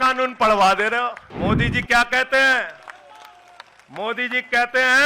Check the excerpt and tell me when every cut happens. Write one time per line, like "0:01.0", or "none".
0:01.2